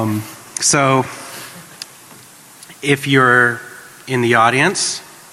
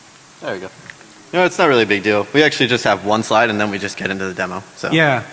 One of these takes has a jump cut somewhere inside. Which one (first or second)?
first